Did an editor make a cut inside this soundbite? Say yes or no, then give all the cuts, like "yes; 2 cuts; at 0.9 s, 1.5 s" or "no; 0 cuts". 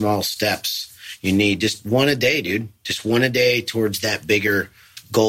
no; 0 cuts